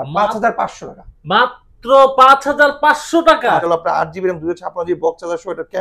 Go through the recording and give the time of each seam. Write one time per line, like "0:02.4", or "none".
0:03.6